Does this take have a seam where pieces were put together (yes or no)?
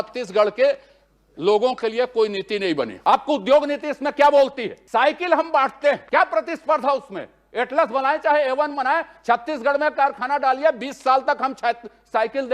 yes